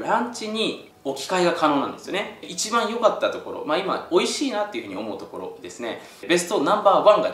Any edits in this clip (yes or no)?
yes